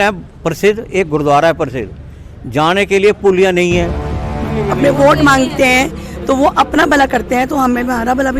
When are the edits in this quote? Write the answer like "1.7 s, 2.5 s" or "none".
4.4 s